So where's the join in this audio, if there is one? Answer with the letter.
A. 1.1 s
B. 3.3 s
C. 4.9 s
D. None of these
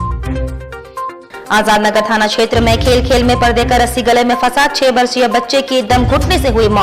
A